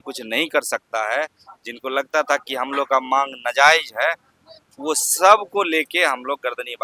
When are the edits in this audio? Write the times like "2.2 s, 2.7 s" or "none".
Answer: none